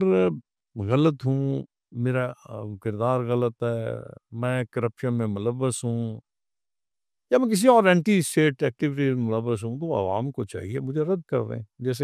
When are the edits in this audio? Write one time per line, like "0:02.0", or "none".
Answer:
none